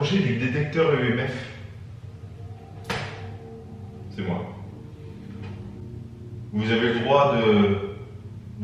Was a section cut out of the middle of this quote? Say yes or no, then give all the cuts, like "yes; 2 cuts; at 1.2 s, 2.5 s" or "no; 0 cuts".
no; 0 cuts